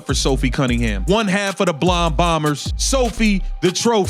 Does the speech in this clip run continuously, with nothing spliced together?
no; 2 cuts; at 1.0 s, 2.7 s

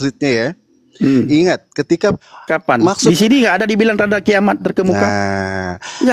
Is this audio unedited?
no; 1 cut; at 2.3 s

